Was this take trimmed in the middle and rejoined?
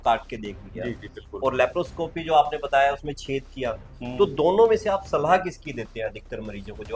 no; 0 cuts

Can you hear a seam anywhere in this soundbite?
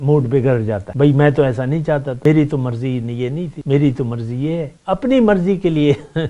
yes; 4 cuts; at 0.9 s, 2.1 s, 3.5 s, 4.7 s

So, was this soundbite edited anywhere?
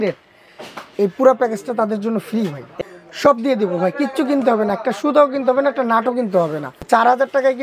yes; 2 cuts; at 2.7 s, 6.7 s

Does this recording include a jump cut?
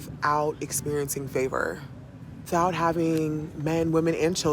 yes; 1 cut; at 2.5 s

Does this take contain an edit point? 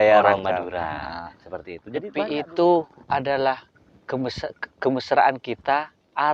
yes; 1 cut; at 2.1 s

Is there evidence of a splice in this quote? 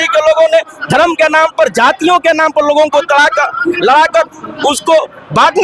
no; 0 cuts

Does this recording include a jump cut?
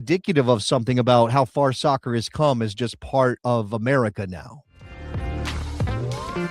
yes; 1 cut; at 5.0 s

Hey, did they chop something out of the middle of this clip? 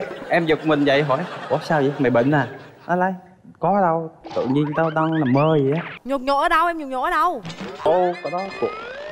yes; 1 cut; at 7.8 s

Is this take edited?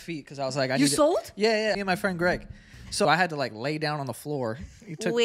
yes; 2 cuts; at 1.8 s, 3.0 s

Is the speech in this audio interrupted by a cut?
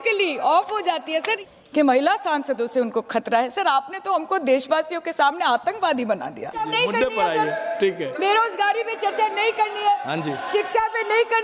yes; 2 cuts; at 1.3 s, 6.7 s

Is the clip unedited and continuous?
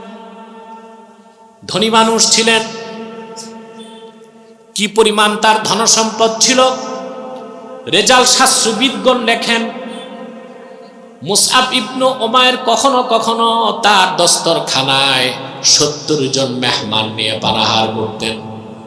yes; 0 cuts

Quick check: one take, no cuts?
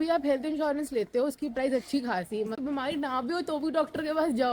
no; 1 cut; at 2.6 s

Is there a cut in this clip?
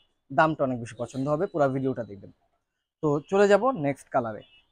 no; 0 cuts

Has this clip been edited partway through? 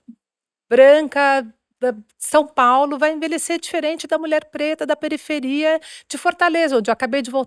no; 0 cuts

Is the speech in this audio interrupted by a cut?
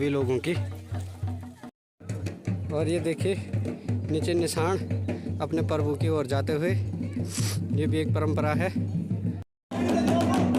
no; 0 cuts

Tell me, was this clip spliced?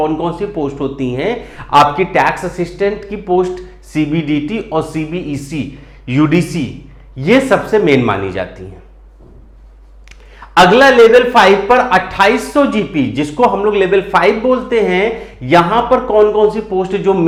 no; 0 cuts

